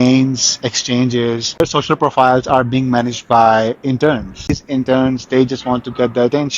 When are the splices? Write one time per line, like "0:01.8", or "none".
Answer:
0:01.6
0:04.6